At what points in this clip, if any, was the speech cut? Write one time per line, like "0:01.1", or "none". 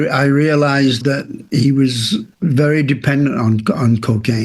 0:02.3